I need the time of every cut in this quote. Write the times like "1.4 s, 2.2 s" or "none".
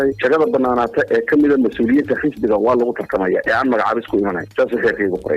4.5 s

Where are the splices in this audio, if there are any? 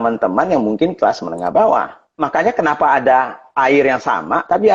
2.1 s

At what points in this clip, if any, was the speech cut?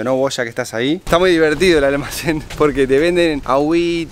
1.0 s

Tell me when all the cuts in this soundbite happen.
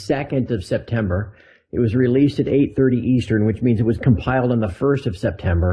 none

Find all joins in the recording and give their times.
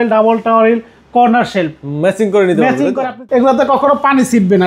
3.1 s

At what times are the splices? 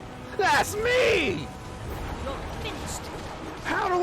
1.8 s

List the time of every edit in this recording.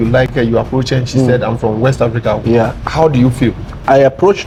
none

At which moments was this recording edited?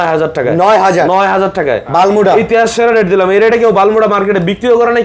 none

